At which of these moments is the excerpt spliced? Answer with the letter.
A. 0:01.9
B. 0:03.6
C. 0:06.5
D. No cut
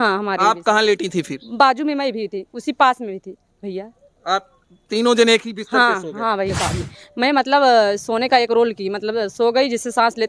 C